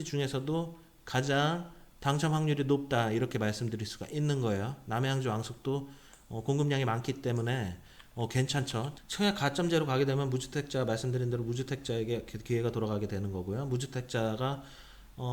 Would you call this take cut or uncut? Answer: cut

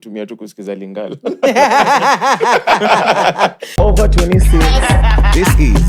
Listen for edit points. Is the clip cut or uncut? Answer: cut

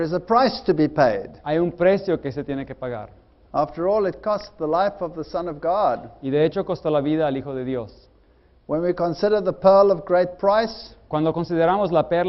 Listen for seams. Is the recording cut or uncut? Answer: uncut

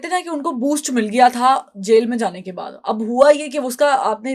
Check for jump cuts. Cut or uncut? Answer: uncut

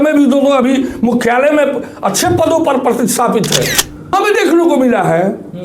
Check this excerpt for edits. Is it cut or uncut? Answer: cut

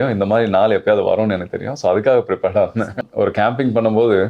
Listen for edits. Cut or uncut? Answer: cut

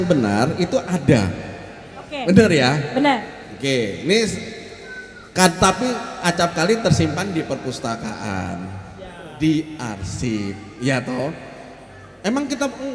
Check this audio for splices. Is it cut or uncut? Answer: uncut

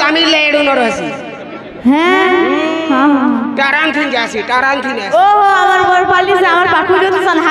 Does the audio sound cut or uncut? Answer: uncut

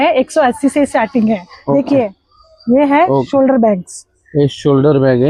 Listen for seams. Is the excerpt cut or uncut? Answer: uncut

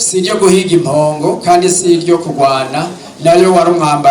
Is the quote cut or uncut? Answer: uncut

